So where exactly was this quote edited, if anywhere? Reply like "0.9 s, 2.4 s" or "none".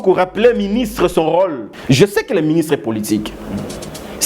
1.7 s